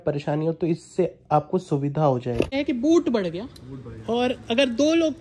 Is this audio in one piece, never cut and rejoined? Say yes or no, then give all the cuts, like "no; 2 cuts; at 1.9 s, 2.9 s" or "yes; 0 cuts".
no; 1 cut; at 2.5 s